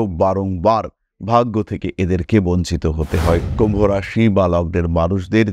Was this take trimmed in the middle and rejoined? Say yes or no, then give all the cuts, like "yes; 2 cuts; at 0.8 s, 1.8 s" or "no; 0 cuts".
yes; 1 cut; at 3.5 s